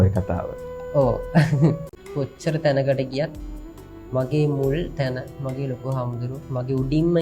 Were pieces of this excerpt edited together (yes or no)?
yes